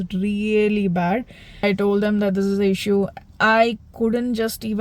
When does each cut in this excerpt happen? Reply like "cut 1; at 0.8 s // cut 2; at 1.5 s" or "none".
cut 1; at 1.4 s